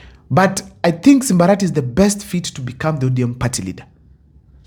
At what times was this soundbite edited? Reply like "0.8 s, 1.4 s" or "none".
none